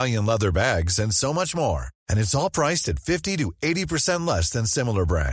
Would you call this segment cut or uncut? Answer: uncut